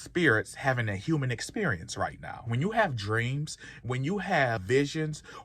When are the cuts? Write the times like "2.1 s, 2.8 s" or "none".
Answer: 2.5 s, 4.6 s